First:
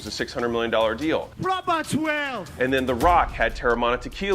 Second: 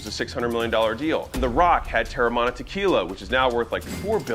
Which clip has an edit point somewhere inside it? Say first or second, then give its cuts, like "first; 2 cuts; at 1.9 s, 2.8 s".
second; 1 cut; at 1.4 s